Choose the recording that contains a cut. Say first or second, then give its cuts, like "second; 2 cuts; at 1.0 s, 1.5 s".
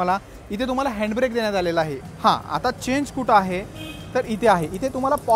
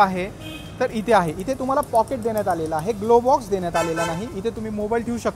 first; 1 cut; at 2.0 s